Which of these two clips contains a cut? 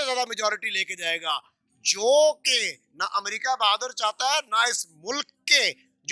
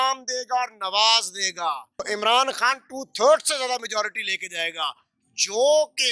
second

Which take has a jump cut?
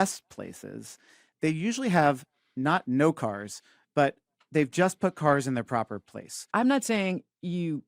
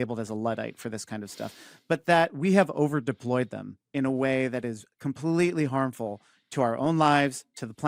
first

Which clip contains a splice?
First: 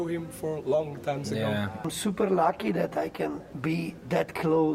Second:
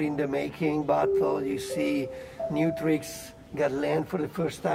first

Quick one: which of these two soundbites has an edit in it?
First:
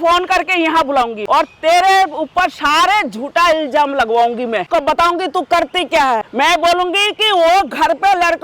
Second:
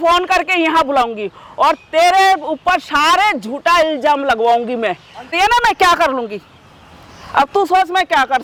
first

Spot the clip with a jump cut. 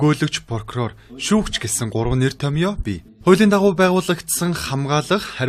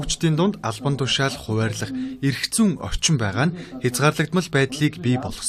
second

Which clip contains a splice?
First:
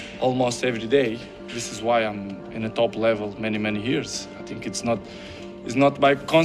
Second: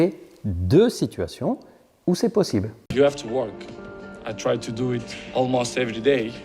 second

